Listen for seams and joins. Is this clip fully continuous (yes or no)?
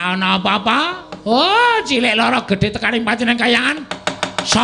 yes